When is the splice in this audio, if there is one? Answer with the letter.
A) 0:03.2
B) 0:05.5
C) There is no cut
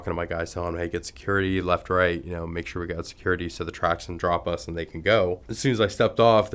B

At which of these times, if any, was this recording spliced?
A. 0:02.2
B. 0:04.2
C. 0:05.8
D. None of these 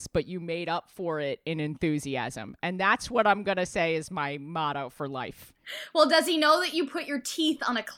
C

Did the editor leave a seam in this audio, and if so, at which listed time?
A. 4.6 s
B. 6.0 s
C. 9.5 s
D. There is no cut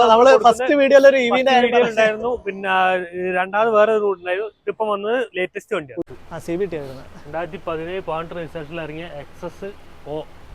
B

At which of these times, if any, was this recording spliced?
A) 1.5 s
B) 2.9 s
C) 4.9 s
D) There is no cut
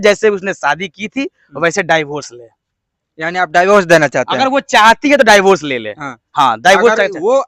D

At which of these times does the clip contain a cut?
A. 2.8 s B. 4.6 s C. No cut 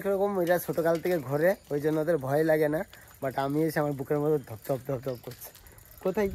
C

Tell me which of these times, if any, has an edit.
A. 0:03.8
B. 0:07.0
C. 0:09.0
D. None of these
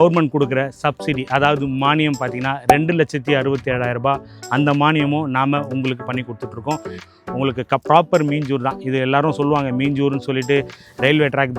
B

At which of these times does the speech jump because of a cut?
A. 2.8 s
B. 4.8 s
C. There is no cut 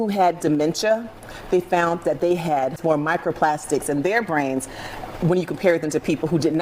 A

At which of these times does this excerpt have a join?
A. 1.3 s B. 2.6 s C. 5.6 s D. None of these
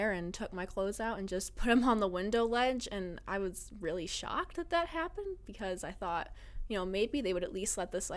D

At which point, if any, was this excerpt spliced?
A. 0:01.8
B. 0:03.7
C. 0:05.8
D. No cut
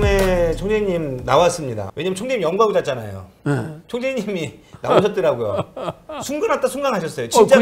A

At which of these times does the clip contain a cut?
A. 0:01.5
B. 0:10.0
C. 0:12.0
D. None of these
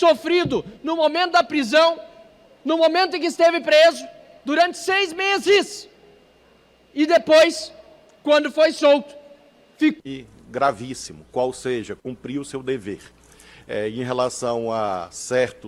B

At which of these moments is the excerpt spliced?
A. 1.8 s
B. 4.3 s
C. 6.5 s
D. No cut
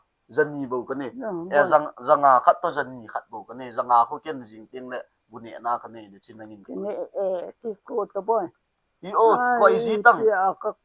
D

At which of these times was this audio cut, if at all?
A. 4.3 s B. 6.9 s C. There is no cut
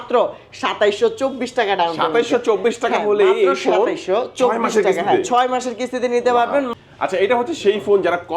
B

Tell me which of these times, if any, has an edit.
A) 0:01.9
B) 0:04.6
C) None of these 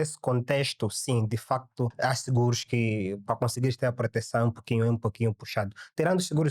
A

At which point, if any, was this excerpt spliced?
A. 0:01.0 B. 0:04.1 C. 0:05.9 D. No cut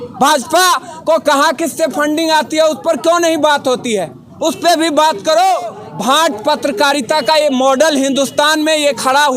C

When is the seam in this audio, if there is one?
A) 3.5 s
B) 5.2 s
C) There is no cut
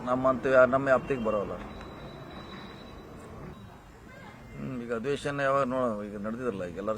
A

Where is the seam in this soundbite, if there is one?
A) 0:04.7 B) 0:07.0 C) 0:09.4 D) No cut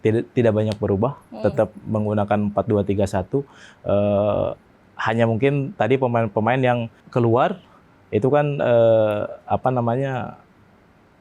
B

